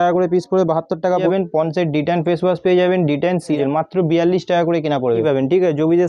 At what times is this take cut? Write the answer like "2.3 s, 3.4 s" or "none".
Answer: 1.2 s, 3.6 s, 5.2 s